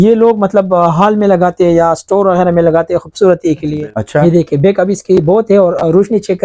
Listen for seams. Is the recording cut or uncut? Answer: cut